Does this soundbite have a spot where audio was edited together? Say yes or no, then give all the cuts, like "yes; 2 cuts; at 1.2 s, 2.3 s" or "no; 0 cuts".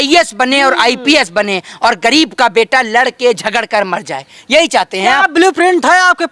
no; 0 cuts